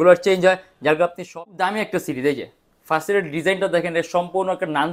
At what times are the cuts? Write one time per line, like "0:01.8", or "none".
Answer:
0:01.3